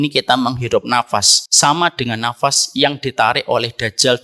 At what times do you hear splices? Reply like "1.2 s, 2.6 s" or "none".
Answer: 1.4 s